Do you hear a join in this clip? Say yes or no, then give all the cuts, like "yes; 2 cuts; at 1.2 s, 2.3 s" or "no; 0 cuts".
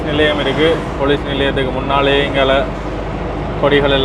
no; 0 cuts